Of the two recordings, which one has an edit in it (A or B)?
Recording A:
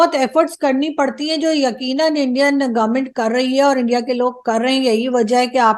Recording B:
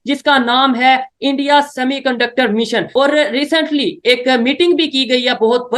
B